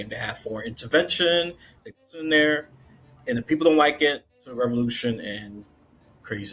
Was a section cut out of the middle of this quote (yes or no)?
yes